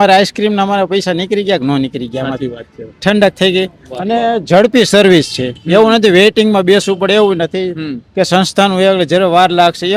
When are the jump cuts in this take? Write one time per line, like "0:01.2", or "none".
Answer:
none